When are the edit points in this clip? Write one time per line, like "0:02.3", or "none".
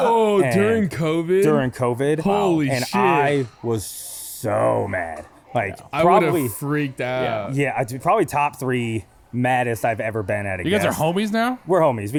none

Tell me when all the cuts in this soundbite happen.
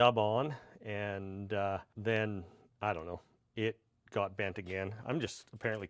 0:01.9

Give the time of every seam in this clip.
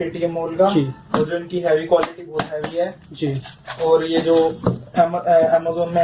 none

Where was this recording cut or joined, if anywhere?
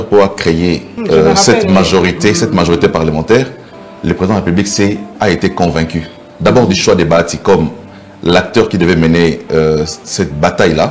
0:00.9

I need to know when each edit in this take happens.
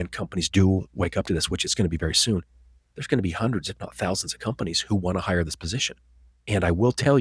none

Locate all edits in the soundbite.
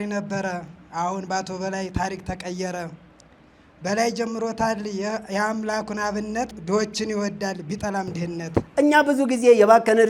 0:06.5
0:08.7

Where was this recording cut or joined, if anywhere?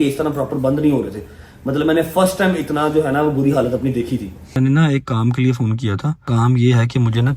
0:04.6
0:06.2

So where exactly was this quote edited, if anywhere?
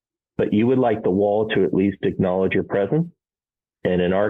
0:03.2

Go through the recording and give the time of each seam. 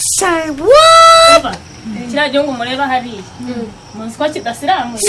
0:01.4

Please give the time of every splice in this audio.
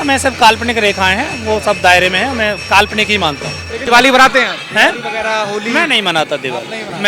0:03.8

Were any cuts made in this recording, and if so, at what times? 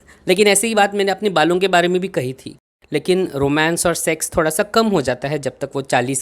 0:02.7

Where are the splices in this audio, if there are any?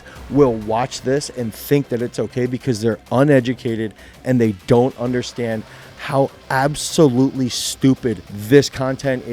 0:08.3

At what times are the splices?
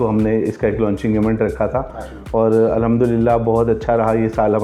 none

